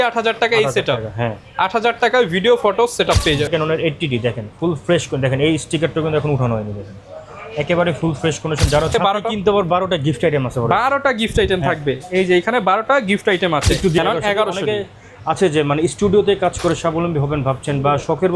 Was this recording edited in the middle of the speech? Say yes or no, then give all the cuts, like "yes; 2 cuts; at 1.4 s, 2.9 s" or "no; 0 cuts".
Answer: yes; 3 cuts; at 3.5 s, 8.9 s, 14.0 s